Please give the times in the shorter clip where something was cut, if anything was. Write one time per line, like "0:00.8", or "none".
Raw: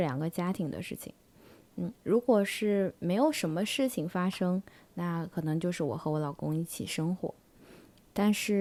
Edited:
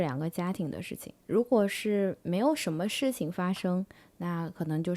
0:01.2